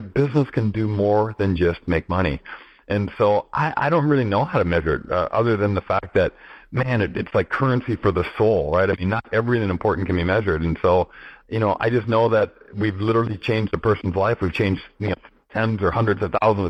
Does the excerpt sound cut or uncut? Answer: uncut